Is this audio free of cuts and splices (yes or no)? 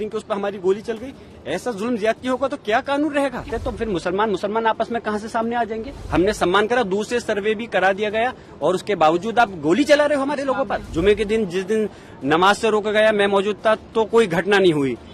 no